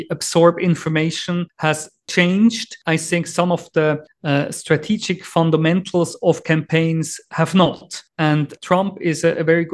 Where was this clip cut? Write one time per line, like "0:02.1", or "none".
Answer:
0:01.5
0:02.7
0:04.1
0:08.5